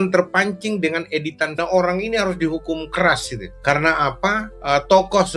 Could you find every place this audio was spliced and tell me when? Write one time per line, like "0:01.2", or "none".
0:01.5

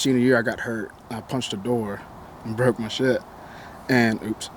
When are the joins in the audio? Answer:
0:01.0

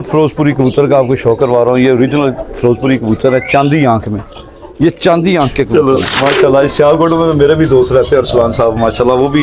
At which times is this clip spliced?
0:05.7

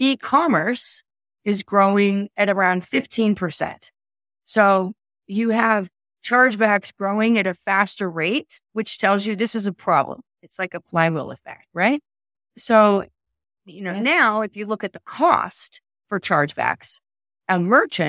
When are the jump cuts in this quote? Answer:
none

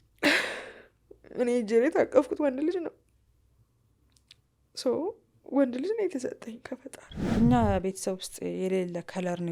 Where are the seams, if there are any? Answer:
0:07.1

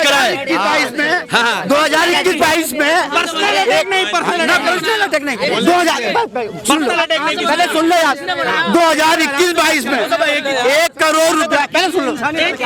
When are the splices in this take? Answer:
none

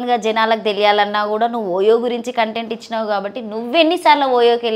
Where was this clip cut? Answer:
none

